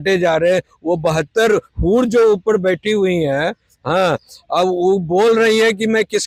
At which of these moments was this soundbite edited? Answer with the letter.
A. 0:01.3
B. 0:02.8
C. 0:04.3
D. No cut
D